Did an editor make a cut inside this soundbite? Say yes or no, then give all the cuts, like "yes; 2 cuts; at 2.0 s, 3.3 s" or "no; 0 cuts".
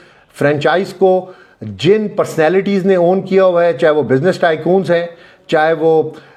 no; 0 cuts